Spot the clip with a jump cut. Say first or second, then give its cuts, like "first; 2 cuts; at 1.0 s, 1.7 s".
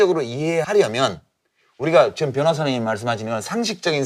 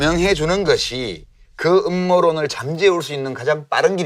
second; 1 cut; at 1.5 s